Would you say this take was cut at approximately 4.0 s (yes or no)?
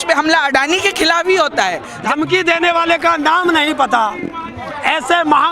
no